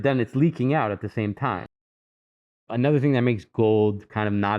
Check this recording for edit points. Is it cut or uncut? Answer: cut